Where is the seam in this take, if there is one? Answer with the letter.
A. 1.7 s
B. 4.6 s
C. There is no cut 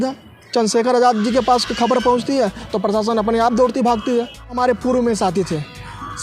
B